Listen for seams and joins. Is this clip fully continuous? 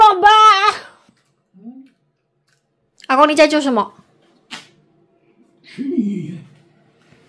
yes; 0 cuts

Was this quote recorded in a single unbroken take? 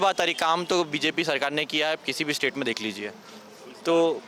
yes; 0 cuts

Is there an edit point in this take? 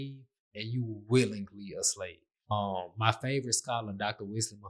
yes; 1 cut; at 2.5 s

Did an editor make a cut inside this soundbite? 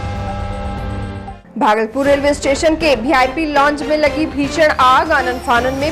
yes; 1 cut; at 1.4 s

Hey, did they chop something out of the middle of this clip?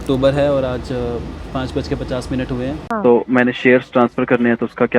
yes; 1 cut; at 2.8 s

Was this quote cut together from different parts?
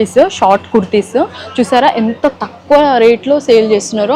no; 0 cuts

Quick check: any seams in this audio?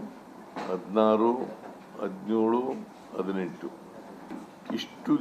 yes; 1 cut; at 4.2 s

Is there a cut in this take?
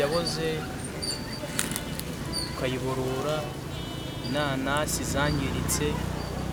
no; 0 cuts

